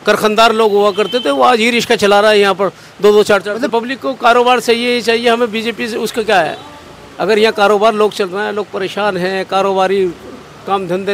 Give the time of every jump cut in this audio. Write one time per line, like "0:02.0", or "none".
0:03.7